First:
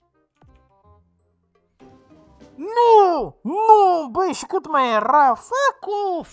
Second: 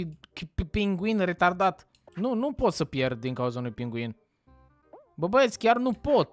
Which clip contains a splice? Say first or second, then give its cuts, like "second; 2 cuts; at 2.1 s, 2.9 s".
second; 1 cut; at 2.0 s